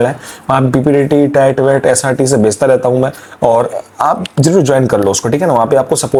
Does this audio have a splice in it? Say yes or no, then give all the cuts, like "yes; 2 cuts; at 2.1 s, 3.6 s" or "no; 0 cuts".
no; 0 cuts